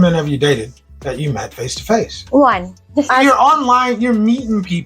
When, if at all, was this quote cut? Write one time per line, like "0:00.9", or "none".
0:03.1

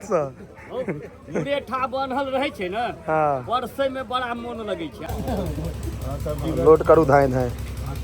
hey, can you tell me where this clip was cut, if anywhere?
0:05.0

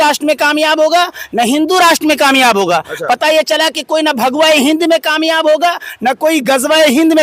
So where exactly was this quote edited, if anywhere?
none

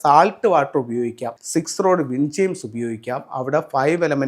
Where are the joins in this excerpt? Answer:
0:01.3

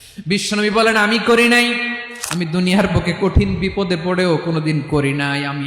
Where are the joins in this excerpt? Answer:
0:02.0

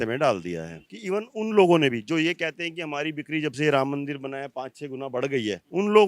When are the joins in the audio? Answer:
0:00.9

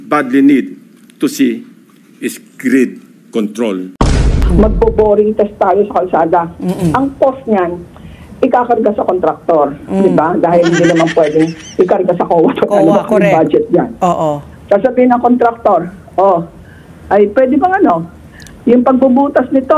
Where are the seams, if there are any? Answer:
0:04.4

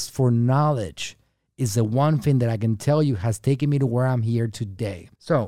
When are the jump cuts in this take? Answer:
none

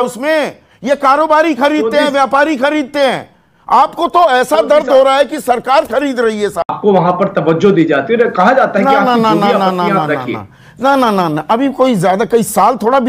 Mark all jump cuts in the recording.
0:06.7

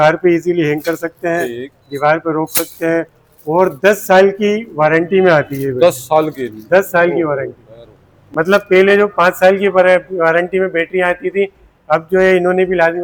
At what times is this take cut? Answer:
none

